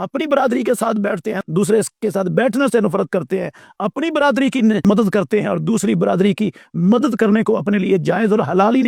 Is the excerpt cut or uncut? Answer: uncut